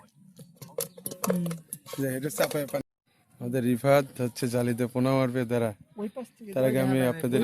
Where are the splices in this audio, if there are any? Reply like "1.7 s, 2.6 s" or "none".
2.8 s

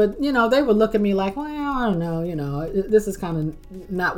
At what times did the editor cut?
none

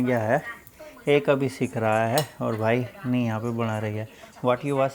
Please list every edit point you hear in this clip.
none

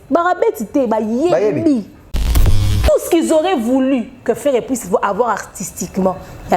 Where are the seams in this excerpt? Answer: 2.4 s

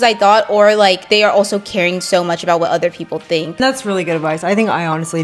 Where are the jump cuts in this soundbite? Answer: 1.0 s, 3.6 s

